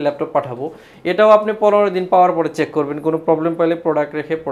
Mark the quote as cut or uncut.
uncut